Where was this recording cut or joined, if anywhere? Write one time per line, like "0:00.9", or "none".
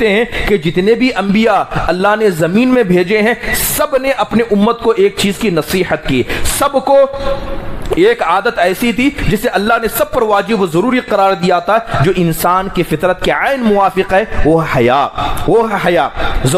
none